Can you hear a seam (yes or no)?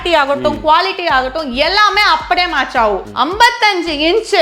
yes